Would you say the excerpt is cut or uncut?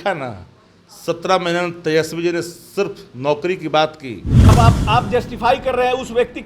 cut